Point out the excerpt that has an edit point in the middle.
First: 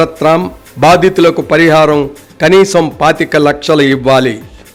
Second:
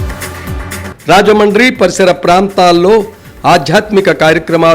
second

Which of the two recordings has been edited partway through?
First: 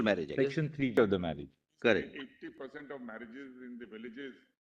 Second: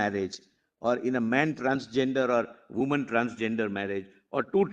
first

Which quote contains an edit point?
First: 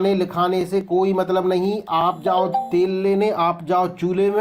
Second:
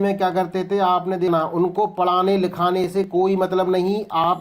second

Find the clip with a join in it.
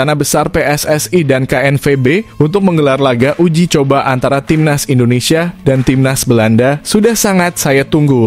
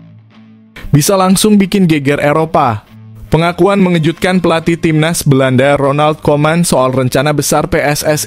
second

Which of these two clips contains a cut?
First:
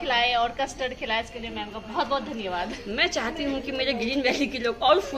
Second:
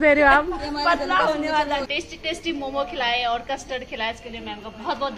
second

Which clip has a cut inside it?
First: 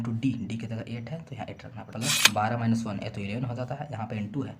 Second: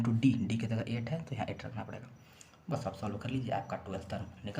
first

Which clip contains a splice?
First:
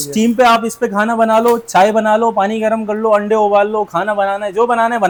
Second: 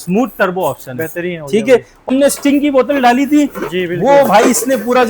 second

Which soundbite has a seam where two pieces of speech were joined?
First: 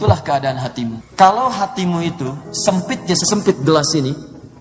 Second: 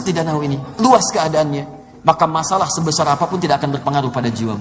first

